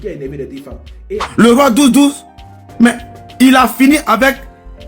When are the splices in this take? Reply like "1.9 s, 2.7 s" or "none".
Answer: 1.3 s

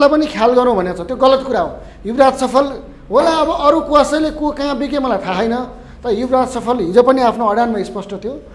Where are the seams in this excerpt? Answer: none

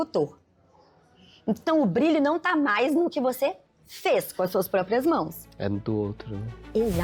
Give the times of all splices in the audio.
none

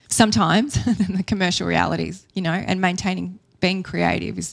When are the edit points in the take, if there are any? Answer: none

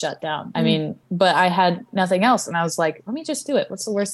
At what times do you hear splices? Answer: 1.0 s, 3.0 s

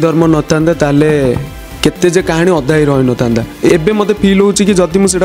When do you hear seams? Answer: 3.7 s

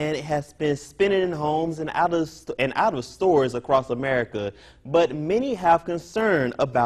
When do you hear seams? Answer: none

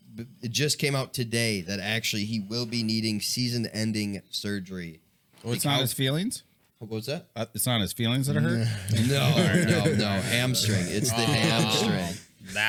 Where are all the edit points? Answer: none

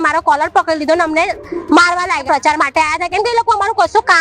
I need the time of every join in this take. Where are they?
2.2 s

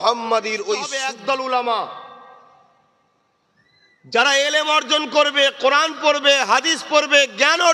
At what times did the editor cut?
1.1 s

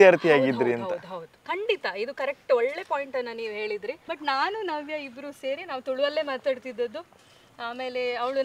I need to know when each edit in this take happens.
4.0 s

